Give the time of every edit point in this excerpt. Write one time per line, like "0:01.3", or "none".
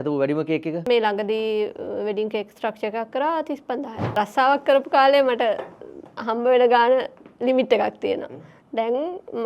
0:04.0

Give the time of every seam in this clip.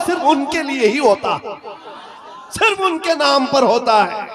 none

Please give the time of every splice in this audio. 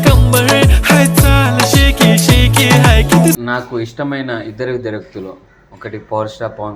0:03.4

